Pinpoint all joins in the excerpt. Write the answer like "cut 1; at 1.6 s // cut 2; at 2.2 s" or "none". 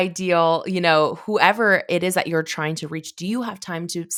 none